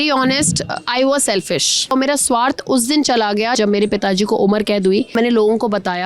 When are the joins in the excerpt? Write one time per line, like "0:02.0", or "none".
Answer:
0:01.9
0:03.6
0:05.1